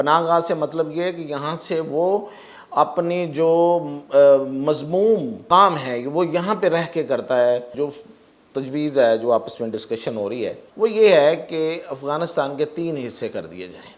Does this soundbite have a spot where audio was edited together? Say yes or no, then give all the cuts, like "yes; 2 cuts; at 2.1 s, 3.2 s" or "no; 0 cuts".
yes; 3 cuts; at 5.4 s, 7.7 s, 10.6 s